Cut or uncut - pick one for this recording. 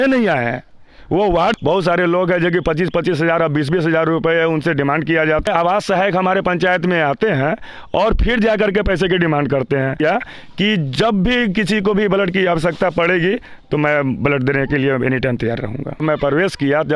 cut